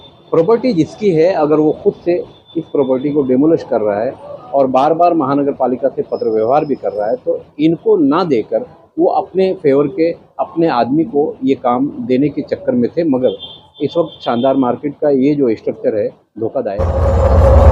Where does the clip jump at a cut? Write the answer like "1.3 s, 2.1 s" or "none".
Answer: 16.8 s